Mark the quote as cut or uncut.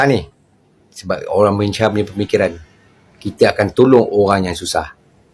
uncut